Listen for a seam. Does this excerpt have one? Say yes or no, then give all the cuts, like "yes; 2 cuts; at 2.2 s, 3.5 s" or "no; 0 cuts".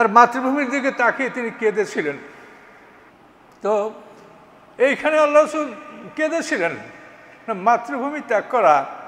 yes; 1 cut; at 3.1 s